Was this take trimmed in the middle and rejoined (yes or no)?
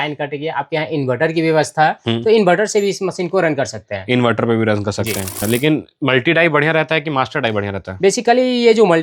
yes